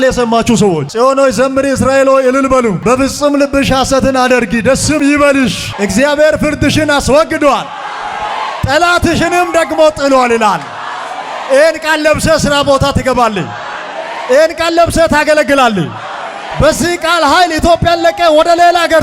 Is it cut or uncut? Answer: uncut